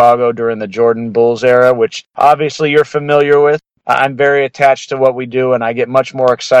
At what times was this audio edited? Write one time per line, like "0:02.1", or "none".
0:02.0
0:03.7